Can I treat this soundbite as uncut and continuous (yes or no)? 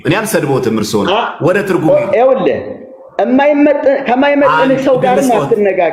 yes